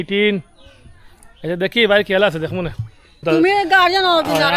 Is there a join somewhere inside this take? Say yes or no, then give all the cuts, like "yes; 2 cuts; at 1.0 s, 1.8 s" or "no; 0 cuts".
yes; 1 cut; at 3.2 s